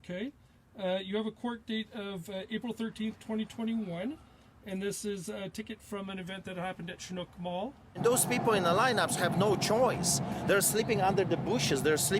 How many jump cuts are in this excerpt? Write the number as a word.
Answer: one